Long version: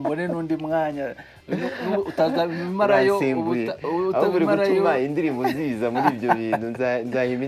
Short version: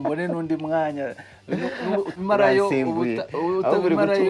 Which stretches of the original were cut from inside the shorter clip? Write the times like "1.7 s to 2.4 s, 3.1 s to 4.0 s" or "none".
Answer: 2.1 s to 2.6 s